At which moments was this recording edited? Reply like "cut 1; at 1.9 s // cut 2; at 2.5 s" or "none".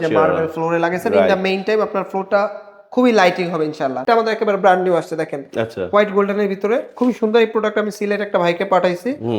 cut 1; at 4.0 s